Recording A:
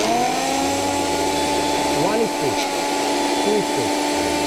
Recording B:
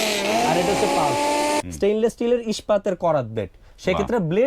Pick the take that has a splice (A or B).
B